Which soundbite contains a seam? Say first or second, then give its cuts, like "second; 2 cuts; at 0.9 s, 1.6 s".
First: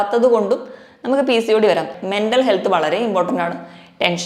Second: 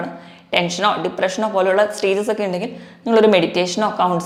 first; 1 cut; at 2.0 s